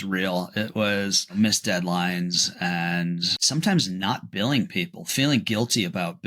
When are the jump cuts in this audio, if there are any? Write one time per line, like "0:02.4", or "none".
0:01.2
0:03.3